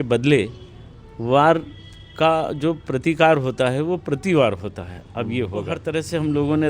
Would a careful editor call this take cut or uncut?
cut